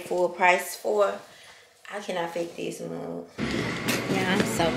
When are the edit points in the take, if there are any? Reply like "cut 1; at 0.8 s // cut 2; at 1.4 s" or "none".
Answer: cut 1; at 3.4 s